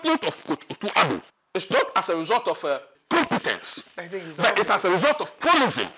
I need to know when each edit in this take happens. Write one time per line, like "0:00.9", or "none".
0:01.3
0:02.9

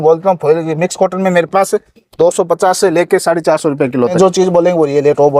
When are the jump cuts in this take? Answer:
0:04.1

